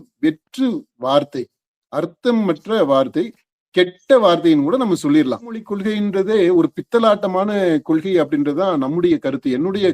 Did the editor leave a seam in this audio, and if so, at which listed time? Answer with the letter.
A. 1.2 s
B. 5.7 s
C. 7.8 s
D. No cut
B